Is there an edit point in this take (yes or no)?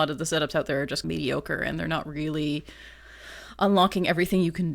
yes